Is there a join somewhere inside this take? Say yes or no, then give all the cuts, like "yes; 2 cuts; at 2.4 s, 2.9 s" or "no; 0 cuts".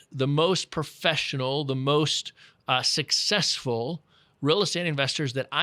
no; 0 cuts